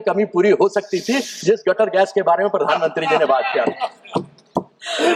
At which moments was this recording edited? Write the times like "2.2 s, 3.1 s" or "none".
none